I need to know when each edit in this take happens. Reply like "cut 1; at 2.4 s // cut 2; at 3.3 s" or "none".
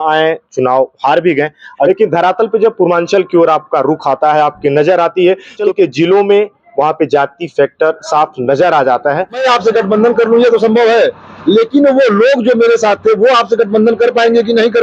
cut 1; at 1.9 s // cut 2; at 5.6 s // cut 3; at 9.4 s